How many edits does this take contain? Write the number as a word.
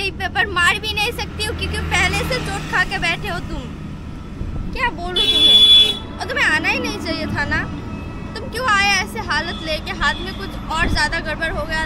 zero